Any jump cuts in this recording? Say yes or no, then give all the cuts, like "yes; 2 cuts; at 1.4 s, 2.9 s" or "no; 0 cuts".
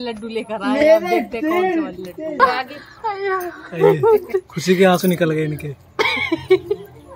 yes; 1 cut; at 2.4 s